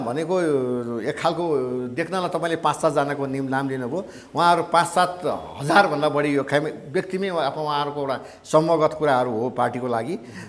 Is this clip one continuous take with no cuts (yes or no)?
yes